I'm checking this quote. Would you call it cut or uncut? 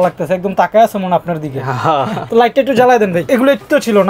cut